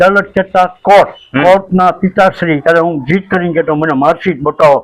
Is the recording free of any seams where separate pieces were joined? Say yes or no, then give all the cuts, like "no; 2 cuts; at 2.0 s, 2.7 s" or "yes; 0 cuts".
no; 1 cut; at 2.6 s